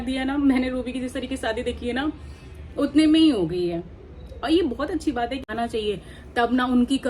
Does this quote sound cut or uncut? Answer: cut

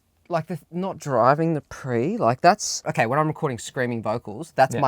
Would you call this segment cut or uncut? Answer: cut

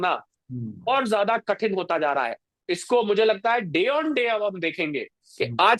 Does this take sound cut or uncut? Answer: uncut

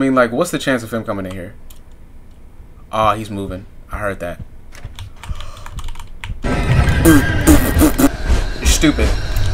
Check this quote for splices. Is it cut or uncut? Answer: cut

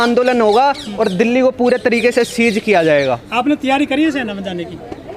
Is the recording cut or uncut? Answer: uncut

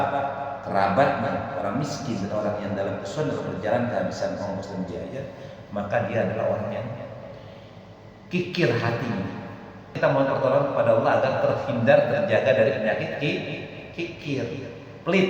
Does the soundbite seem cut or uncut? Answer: cut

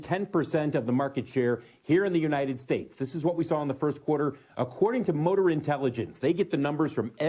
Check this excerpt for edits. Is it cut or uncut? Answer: uncut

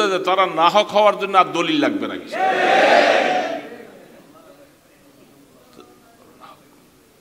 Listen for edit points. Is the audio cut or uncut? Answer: uncut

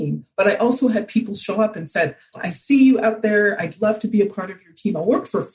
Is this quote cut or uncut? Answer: cut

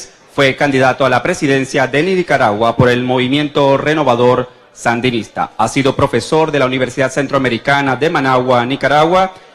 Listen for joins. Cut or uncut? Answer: cut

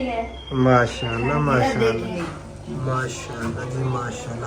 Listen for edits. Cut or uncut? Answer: cut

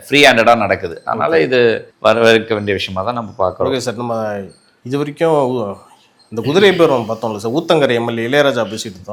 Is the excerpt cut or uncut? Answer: uncut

